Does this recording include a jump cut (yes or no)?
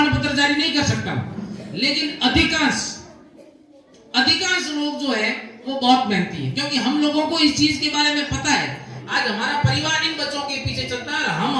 yes